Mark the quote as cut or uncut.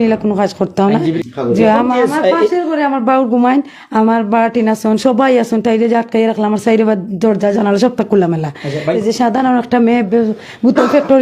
cut